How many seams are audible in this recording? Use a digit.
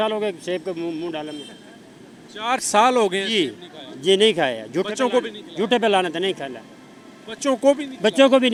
0